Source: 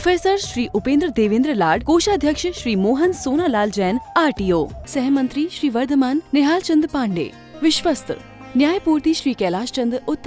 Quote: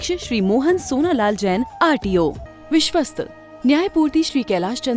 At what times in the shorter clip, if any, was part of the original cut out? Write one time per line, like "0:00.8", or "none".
0:02.5